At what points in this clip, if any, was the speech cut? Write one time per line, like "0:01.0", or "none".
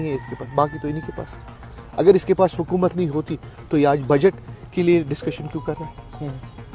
none